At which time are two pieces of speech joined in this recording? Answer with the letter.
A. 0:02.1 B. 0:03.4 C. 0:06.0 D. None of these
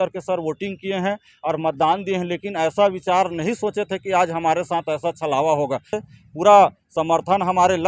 C